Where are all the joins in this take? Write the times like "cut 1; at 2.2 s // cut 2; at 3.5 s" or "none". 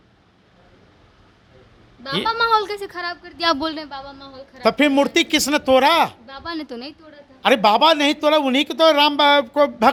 none